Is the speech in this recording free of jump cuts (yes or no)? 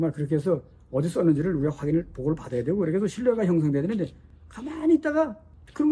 yes